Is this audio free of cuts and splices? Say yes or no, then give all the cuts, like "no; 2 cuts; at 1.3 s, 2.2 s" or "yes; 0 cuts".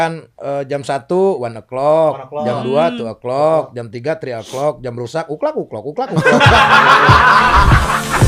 yes; 0 cuts